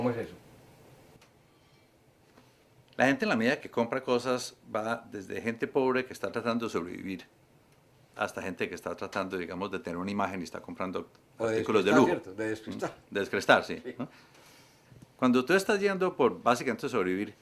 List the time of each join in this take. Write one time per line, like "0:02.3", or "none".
0:13.4